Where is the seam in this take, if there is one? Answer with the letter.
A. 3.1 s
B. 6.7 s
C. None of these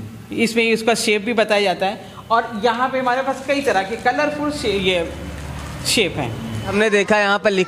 B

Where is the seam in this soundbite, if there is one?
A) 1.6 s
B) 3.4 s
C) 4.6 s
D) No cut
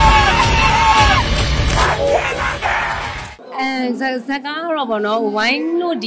D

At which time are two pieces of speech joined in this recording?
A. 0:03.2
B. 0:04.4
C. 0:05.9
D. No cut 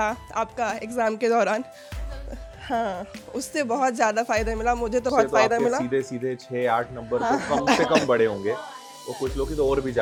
D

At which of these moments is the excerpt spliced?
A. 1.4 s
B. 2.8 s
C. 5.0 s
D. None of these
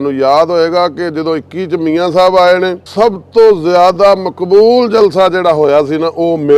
B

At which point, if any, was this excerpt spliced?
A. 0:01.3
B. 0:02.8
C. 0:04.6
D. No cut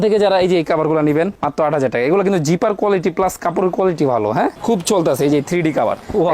C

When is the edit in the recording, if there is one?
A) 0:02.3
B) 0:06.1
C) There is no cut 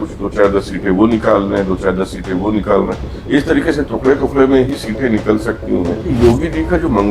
B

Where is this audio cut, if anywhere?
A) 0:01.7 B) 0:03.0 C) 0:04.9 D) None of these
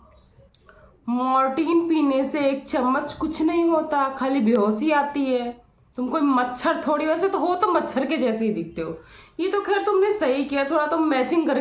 D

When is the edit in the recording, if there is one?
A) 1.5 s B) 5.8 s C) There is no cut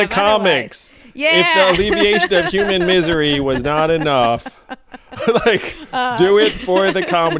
C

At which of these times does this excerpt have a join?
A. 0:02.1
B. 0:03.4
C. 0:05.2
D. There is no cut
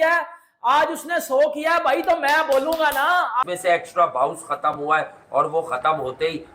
B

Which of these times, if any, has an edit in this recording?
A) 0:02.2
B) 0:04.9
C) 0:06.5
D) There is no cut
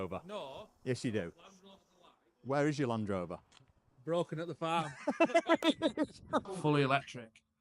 C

